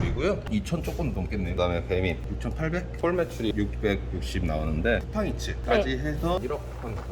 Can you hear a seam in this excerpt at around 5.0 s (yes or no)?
yes